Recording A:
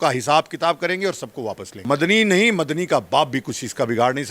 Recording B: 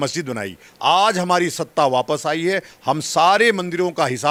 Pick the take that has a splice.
A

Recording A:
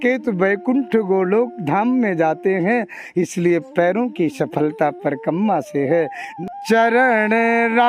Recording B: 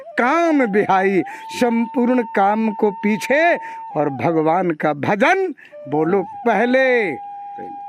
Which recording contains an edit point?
A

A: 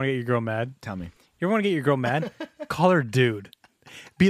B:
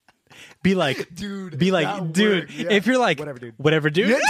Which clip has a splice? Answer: A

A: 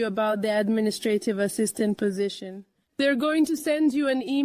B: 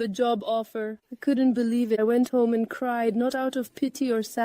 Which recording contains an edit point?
B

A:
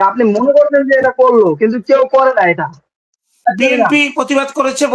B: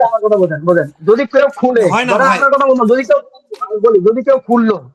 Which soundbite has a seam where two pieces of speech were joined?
A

